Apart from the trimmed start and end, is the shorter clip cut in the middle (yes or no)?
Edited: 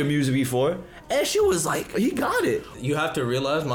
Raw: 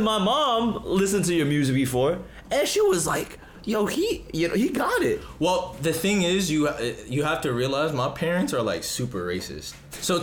yes